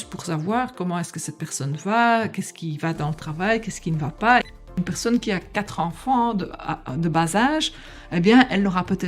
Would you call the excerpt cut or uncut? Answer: cut